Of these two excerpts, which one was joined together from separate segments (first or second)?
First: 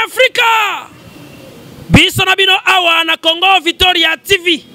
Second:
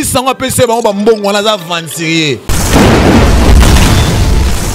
second